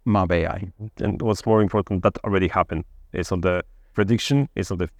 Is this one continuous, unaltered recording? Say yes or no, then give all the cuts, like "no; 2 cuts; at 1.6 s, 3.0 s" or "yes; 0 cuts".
yes; 0 cuts